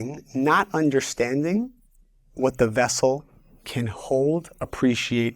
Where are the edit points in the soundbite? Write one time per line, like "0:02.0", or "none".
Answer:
none